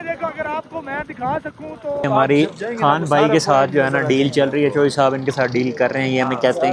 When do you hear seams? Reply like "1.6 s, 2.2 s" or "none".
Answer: 2.0 s